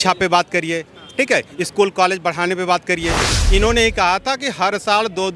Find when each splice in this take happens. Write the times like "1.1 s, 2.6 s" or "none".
3.3 s